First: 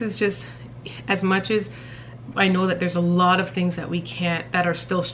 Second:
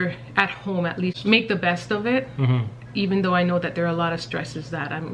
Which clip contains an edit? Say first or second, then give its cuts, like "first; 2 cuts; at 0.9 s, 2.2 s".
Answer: second; 1 cut; at 1.2 s